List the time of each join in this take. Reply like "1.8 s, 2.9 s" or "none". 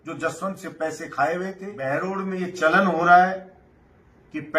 1.9 s